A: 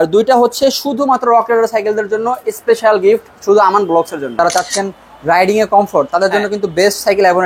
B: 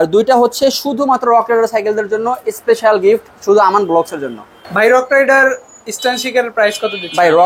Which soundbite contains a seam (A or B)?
A